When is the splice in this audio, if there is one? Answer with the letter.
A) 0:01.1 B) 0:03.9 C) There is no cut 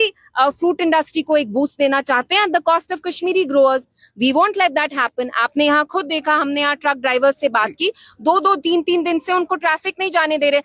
C